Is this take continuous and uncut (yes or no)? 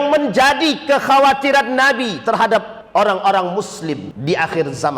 no